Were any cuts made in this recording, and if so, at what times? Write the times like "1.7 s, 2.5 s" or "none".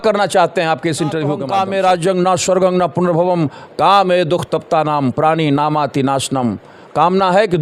1.4 s